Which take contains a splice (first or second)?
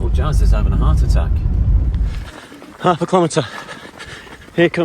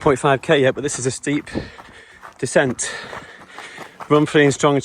first